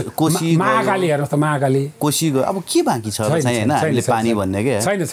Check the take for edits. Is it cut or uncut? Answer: uncut